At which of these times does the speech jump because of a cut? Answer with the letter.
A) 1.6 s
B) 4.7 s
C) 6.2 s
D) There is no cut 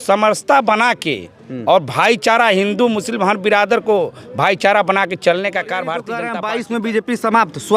C